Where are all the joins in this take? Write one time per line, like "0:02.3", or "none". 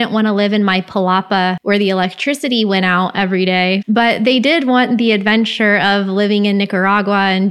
0:01.6
0:03.8